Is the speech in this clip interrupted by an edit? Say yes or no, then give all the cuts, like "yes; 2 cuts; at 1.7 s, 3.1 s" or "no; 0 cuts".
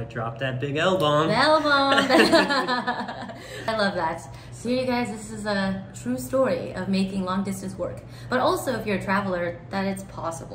yes; 1 cut; at 3.7 s